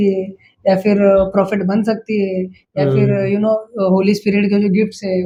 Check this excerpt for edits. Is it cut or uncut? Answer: uncut